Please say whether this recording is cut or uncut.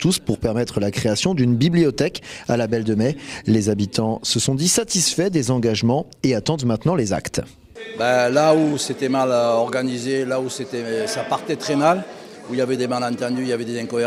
uncut